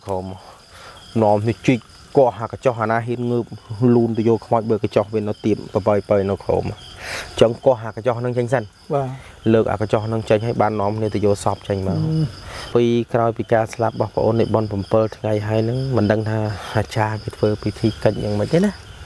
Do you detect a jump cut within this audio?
yes; 1 cut; at 12.6 s

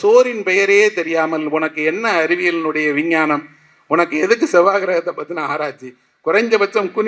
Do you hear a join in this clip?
no; 0 cuts

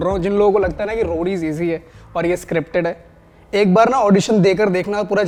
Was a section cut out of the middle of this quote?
no; 0 cuts

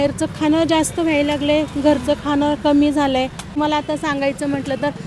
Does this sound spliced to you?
yes; 1 cut; at 3.5 s

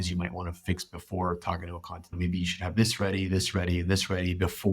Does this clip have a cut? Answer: yes; 1 cut; at 2.2 s

